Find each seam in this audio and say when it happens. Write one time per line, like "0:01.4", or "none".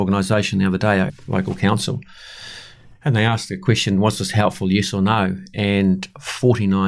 0:01.1